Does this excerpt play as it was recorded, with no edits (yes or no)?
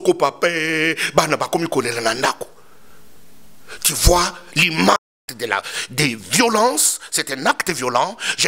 no